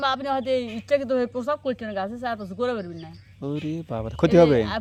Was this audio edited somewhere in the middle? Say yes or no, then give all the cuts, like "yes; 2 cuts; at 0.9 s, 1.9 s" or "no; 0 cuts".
no; 0 cuts